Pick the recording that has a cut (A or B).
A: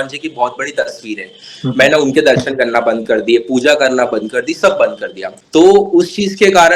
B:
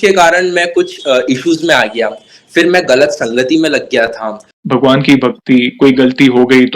B